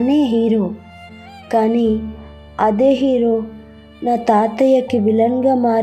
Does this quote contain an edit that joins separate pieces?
no; 0 cuts

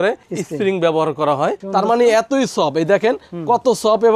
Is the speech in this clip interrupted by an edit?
yes; 1 cut; at 1.6 s

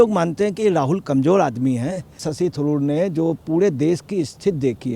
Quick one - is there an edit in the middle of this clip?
yes; 1 cut; at 2.3 s

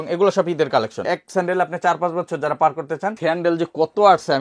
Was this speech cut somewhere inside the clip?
yes; 2 cuts; at 1.1 s, 3.2 s

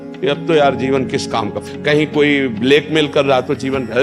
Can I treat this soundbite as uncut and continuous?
yes; 0 cuts

